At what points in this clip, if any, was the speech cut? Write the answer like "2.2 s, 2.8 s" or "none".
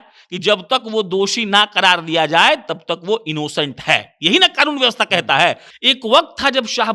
5.7 s